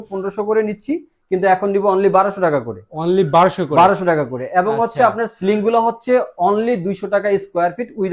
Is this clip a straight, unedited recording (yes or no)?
yes